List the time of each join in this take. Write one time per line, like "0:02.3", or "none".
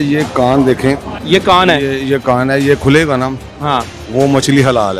0:01.1